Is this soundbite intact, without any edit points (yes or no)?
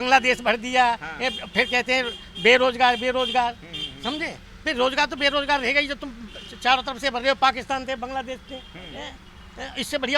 yes